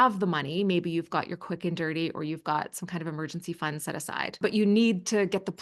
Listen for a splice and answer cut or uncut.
cut